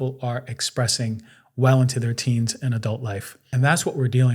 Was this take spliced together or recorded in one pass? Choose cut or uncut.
cut